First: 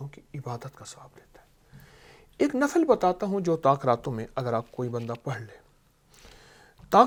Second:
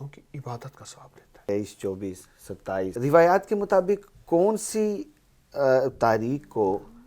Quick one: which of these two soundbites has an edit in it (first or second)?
second